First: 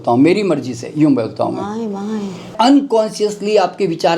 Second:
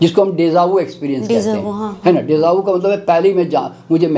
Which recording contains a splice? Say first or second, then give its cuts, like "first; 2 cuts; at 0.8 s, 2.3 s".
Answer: first; 1 cut; at 2.5 s